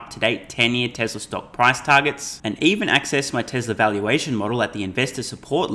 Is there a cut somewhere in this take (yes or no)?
no